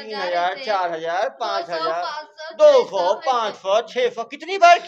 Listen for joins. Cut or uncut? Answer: uncut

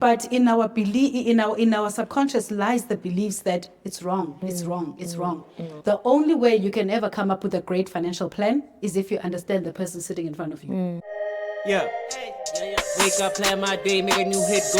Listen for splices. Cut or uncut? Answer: cut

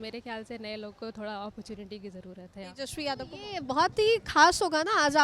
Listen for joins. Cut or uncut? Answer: cut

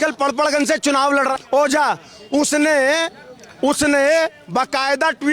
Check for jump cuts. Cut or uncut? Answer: uncut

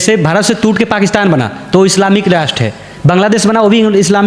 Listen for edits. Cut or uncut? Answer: uncut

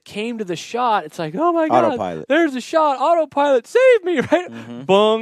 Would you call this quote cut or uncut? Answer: uncut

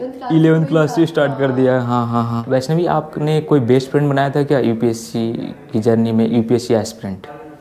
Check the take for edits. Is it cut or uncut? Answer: uncut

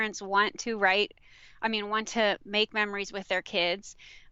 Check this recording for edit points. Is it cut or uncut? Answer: uncut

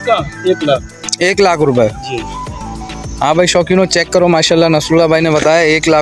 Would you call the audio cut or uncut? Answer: uncut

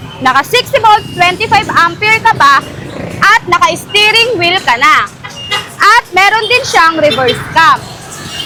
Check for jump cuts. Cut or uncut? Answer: uncut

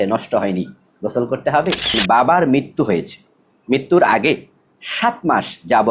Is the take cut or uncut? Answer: cut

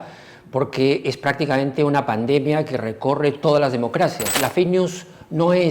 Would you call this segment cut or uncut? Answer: cut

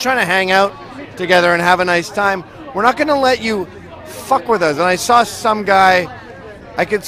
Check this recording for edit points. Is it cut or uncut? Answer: uncut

